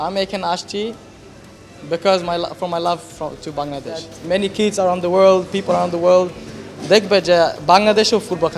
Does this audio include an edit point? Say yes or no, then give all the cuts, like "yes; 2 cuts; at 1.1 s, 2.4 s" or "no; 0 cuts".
yes; 1 cut; at 4.1 s